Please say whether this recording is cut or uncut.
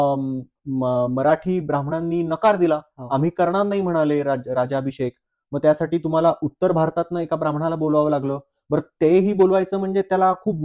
uncut